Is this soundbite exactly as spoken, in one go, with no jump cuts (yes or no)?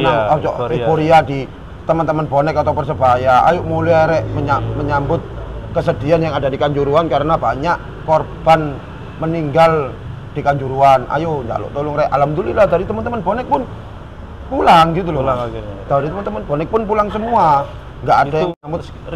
yes